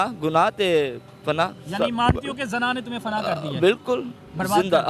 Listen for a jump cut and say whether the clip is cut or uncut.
uncut